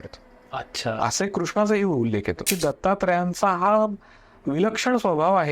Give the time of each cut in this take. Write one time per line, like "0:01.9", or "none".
0:02.5